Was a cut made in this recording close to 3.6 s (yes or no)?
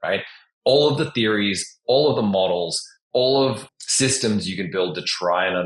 yes